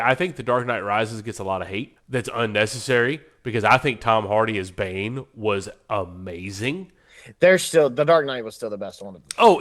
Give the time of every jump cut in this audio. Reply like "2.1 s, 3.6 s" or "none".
2.0 s